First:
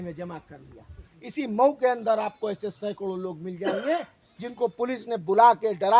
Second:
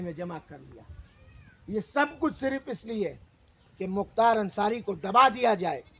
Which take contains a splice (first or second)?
first